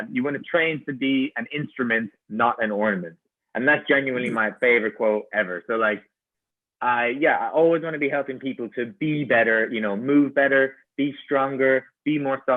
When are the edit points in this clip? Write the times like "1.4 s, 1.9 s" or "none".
none